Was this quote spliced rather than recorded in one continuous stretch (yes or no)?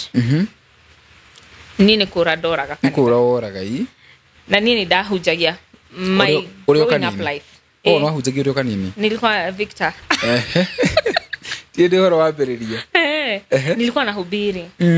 no